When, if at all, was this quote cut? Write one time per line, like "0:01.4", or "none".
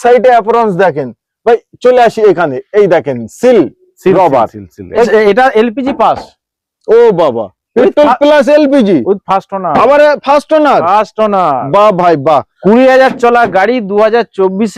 0:05.1
0:12.5